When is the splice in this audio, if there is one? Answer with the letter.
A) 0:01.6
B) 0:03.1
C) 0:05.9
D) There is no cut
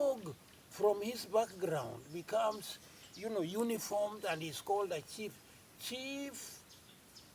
D